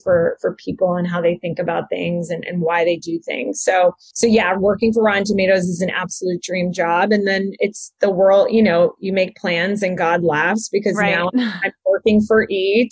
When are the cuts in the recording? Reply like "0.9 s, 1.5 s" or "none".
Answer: 4.1 s